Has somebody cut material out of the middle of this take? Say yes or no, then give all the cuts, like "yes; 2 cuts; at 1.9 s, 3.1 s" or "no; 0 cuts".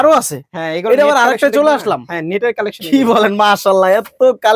no; 0 cuts